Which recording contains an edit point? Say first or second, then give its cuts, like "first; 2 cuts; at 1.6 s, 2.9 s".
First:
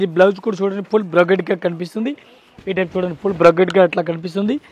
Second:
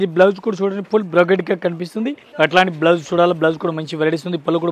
second; 1 cut; at 2.2 s